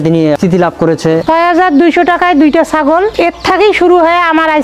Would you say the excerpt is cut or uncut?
cut